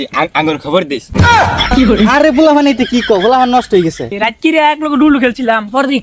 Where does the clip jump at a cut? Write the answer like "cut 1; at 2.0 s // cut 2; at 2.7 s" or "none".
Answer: cut 1; at 4.1 s